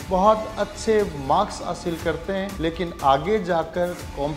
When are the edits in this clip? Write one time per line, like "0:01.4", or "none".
0:02.5